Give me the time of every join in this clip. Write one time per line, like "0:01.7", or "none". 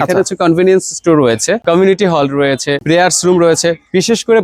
none